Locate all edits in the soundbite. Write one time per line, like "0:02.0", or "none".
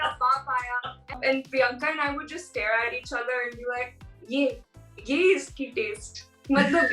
0:01.2